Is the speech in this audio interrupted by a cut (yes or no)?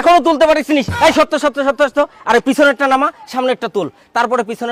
no